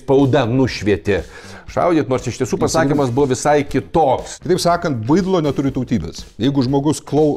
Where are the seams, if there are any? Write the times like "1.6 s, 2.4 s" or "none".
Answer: 4.3 s